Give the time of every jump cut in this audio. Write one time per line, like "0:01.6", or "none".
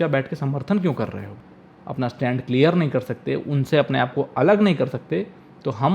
0:01.3

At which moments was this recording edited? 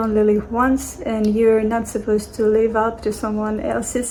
none

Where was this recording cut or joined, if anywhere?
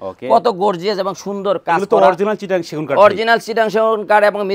none

